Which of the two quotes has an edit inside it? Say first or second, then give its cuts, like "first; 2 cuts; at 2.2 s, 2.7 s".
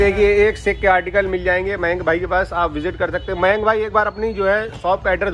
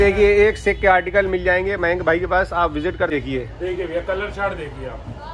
second; 1 cut; at 3.1 s